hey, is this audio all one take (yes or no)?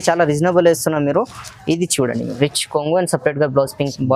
yes